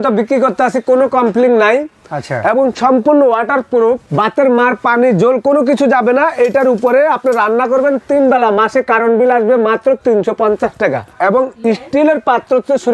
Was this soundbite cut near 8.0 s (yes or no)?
no